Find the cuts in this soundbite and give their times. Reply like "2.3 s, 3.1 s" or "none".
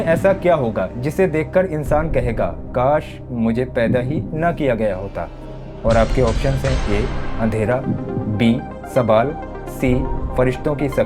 none